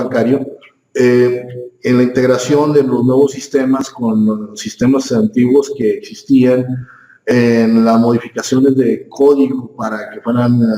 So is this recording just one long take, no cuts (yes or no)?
no